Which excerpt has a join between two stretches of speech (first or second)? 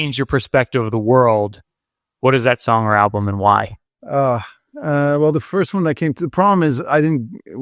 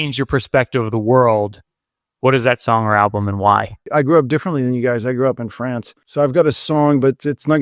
second